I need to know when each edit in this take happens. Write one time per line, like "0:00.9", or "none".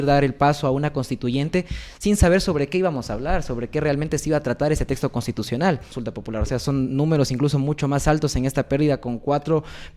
0:06.0